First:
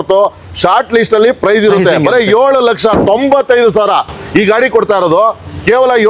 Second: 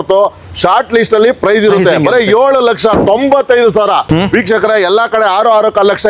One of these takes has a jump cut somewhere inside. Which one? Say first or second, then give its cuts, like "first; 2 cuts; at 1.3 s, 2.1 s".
second; 1 cut; at 4.1 s